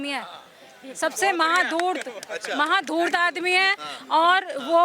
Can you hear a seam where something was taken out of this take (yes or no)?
no